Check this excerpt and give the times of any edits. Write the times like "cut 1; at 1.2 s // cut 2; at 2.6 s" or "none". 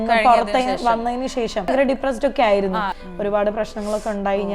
cut 1; at 1.7 s // cut 2; at 2.9 s